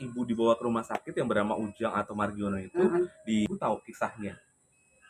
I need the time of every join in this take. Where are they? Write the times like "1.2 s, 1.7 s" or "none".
3.5 s